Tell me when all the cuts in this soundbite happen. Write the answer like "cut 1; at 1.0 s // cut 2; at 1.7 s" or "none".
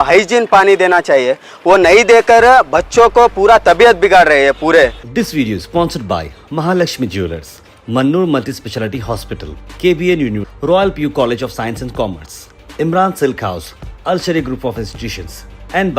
cut 1; at 5.0 s